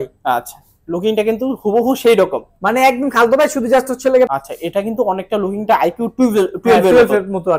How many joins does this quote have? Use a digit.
1